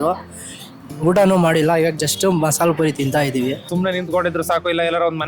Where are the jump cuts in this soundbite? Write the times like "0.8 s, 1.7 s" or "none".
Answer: 3.7 s